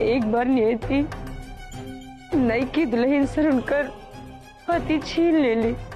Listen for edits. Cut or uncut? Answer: uncut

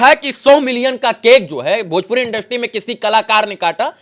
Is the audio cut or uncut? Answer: uncut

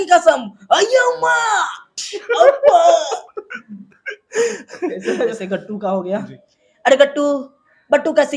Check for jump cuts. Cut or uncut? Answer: cut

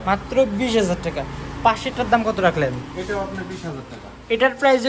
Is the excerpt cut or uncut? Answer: uncut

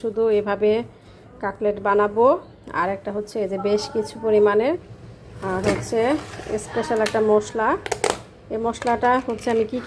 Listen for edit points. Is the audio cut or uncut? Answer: cut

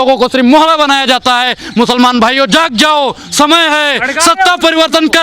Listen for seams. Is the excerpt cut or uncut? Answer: uncut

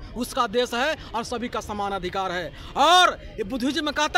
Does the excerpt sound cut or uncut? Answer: uncut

